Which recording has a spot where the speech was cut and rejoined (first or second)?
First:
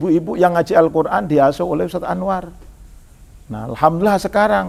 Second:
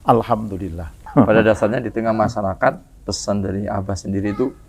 second